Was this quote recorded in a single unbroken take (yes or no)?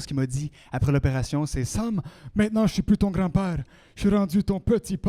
yes